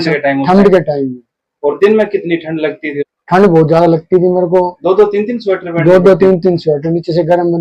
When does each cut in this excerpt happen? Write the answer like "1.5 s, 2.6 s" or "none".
3.0 s